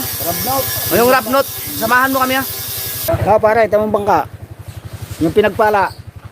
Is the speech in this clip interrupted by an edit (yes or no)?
yes